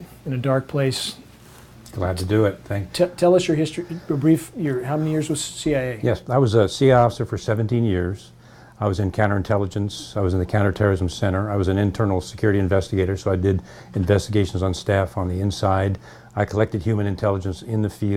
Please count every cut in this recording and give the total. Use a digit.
0